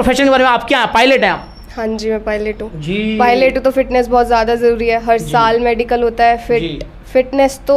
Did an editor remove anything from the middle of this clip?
no; 0 cuts

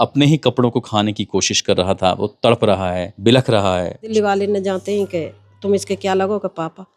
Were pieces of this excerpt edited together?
yes; 2 cuts; at 3.1 s, 4.1 s

